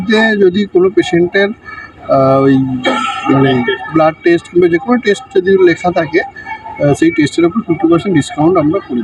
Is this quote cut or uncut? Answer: uncut